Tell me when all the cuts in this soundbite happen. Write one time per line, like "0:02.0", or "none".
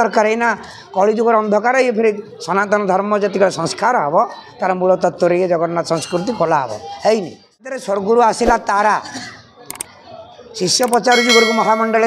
0:07.8